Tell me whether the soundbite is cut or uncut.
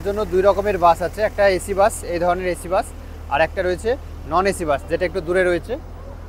uncut